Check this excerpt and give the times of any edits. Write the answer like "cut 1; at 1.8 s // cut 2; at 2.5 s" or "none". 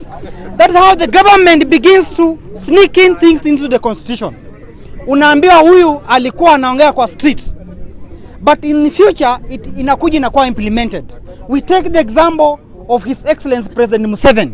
none